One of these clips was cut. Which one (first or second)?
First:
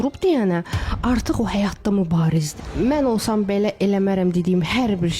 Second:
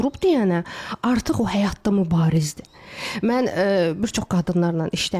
first